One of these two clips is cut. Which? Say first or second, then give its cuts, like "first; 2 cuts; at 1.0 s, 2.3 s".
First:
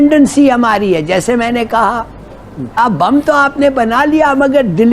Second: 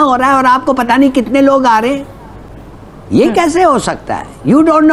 first; 1 cut; at 2.6 s